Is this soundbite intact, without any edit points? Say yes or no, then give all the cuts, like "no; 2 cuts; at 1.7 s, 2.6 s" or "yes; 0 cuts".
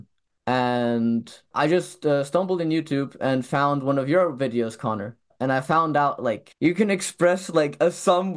no; 1 cut; at 1.5 s